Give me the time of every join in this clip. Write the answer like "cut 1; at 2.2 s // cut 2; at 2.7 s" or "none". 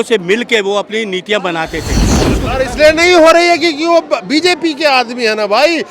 cut 1; at 2.3 s